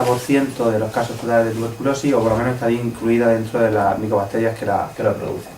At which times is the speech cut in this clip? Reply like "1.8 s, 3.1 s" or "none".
2.2 s